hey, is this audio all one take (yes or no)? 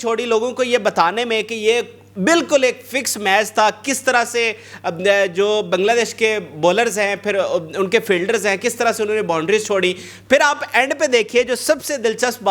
yes